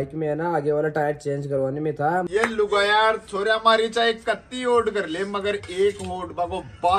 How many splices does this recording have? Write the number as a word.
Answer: one